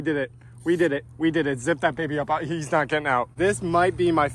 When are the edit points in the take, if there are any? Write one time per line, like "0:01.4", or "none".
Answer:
0:03.3